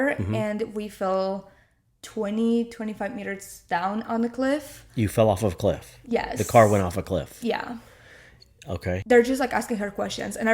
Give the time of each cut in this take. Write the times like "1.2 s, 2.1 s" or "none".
9.0 s